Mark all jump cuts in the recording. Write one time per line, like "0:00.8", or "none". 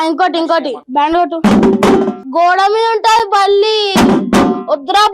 0:01.2
0:02.2